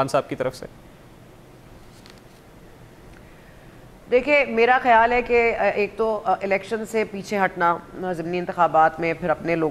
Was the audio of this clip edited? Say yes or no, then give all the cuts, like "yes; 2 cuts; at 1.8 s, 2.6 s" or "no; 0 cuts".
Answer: no; 0 cuts